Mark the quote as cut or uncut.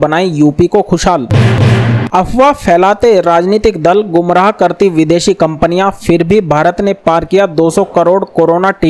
cut